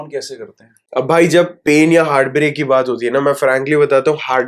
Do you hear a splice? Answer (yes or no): no